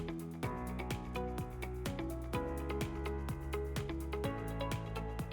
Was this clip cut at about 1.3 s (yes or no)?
no